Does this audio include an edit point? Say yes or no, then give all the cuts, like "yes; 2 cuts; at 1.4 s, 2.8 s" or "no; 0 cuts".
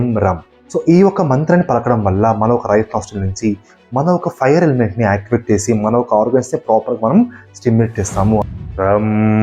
yes; 1 cut; at 8.4 s